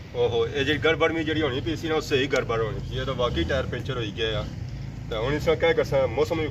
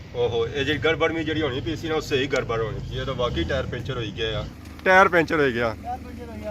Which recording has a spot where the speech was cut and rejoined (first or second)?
second